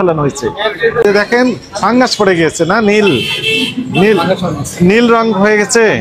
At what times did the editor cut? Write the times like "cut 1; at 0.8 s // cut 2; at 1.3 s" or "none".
cut 1; at 1.0 s